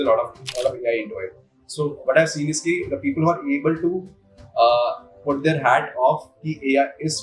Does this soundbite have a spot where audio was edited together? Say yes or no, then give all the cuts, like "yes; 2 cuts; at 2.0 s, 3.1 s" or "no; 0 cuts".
no; 0 cuts